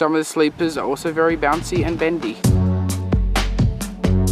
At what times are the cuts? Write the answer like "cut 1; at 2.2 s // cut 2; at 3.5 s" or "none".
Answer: none